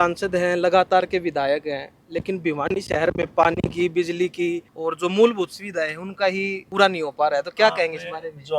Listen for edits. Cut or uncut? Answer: cut